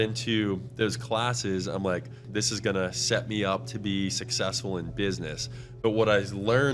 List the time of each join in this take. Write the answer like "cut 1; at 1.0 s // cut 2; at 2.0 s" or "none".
cut 1; at 2.2 s